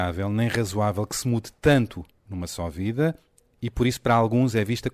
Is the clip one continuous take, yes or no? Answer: yes